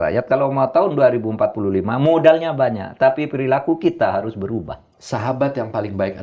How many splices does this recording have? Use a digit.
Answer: 1